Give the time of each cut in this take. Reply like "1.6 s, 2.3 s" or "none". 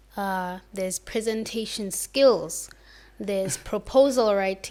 none